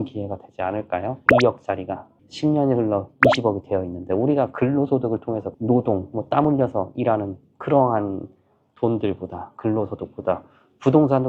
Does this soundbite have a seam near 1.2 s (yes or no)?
yes